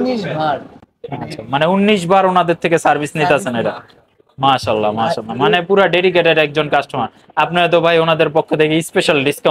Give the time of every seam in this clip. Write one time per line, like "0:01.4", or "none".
none